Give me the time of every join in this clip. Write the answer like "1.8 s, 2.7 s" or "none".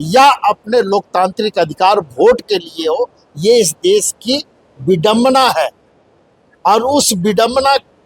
none